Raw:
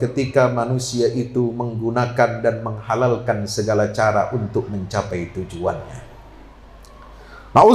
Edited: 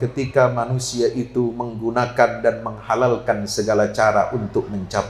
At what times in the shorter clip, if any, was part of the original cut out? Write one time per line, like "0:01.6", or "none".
none